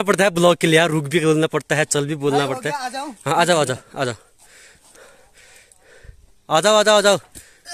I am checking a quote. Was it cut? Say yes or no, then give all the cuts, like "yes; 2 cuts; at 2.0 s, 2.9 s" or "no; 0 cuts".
no; 0 cuts